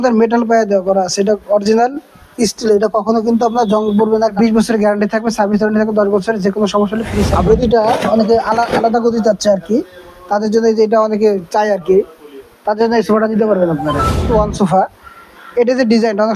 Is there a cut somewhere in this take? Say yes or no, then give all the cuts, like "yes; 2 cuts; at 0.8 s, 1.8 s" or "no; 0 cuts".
yes; 3 cuts; at 4.3 s, 7.4 s, 14.3 s